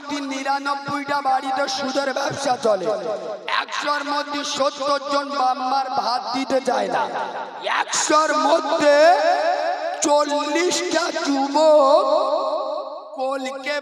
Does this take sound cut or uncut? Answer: uncut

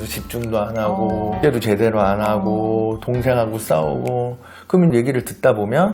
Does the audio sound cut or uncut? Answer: cut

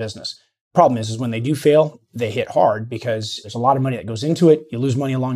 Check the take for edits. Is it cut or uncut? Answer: uncut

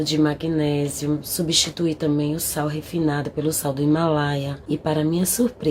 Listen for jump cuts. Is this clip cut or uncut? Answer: cut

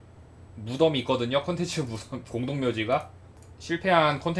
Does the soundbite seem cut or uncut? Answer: uncut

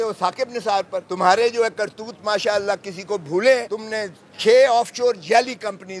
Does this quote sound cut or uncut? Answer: cut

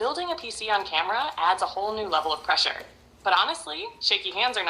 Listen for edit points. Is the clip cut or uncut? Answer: cut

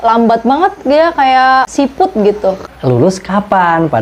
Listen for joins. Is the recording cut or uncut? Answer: cut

